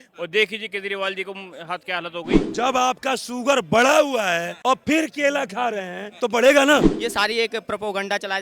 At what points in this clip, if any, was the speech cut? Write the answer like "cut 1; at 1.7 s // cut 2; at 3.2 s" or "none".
cut 1; at 2.4 s // cut 2; at 6.9 s